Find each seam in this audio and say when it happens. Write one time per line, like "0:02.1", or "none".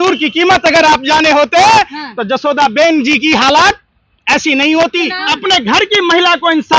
0:05.2